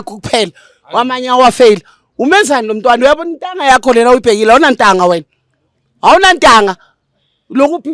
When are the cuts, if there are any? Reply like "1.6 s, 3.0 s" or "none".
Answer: none